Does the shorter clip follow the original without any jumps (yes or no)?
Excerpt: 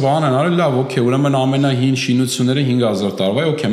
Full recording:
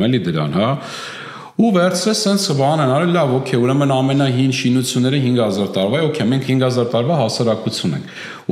yes